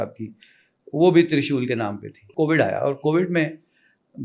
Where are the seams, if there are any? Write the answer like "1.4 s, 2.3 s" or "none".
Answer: 2.3 s